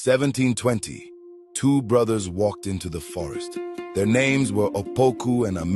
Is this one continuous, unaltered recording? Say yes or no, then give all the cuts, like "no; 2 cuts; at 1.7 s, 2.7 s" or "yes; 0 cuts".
yes; 0 cuts